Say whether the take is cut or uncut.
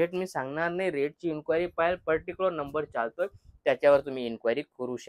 uncut